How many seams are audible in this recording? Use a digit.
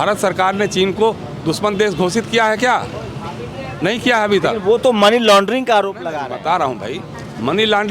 0